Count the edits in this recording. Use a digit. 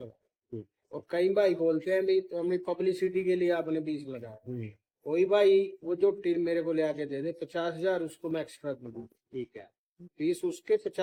0